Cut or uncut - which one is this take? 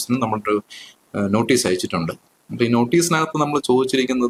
uncut